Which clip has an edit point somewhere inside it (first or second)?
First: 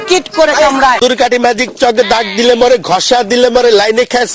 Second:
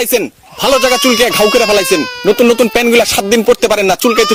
first